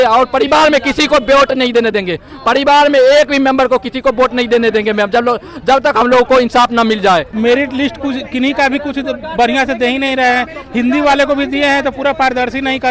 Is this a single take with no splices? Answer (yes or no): yes